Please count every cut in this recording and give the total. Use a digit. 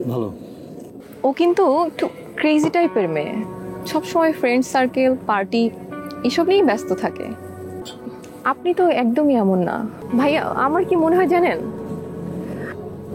3